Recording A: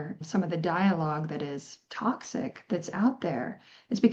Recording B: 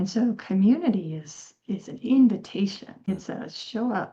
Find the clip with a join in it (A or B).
B